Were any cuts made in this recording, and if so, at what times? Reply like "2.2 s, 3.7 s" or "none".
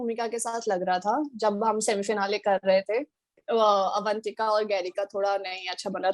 3.3 s